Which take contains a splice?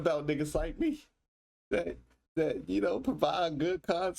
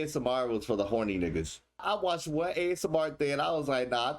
second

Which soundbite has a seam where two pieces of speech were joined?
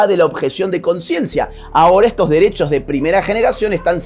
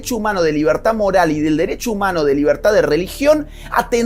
first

